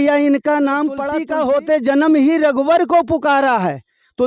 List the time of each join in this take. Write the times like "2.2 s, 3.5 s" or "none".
1.1 s

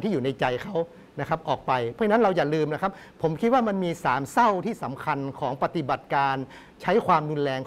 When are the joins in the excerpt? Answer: none

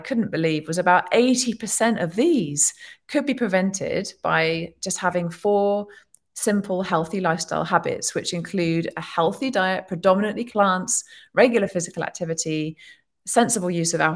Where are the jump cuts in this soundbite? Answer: 10.4 s

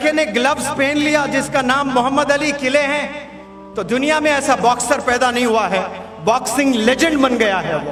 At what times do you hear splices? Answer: none

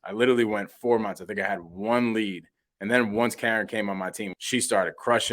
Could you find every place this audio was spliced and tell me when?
4.3 s

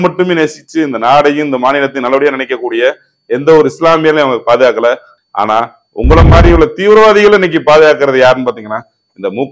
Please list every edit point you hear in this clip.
5.1 s

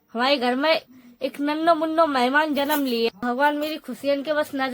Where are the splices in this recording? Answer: 3.2 s

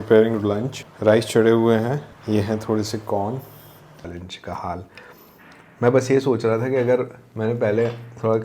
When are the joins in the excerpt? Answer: 4.1 s

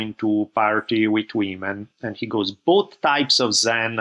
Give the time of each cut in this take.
none

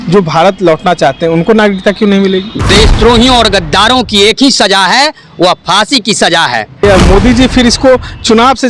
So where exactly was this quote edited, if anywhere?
2.5 s, 6.8 s

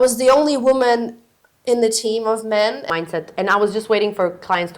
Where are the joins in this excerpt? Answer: 2.8 s

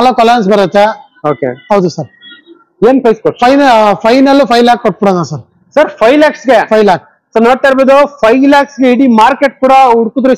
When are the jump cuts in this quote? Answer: none

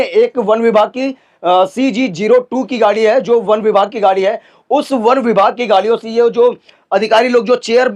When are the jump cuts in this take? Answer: none

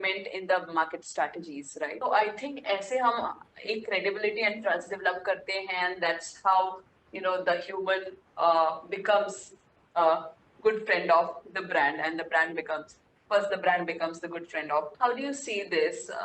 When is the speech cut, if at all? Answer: 1.9 s, 14.9 s

